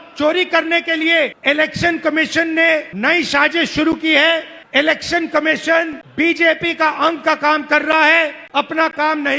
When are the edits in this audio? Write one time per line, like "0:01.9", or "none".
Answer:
0:01.4
0:02.9
0:04.6
0:06.0
0:08.4